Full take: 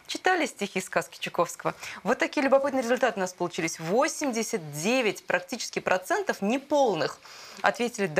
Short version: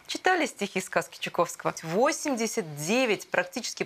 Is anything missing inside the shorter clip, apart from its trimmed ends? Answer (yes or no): yes